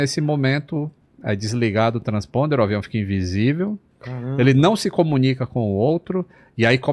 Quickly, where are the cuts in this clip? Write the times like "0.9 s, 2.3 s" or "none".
none